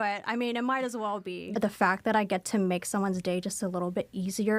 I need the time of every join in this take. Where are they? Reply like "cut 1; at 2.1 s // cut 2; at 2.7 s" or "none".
cut 1; at 1.4 s